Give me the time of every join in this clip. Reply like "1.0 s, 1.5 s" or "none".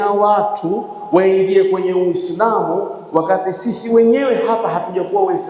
none